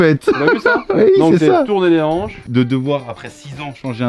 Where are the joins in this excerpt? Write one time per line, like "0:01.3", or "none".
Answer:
0:02.4